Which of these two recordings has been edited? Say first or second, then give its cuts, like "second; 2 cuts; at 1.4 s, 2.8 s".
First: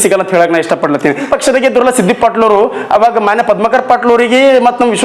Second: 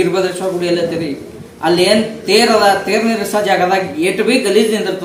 first; 1 cut; at 1.3 s